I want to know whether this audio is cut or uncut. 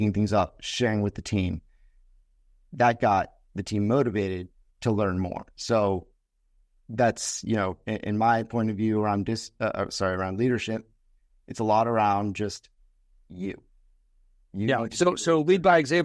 uncut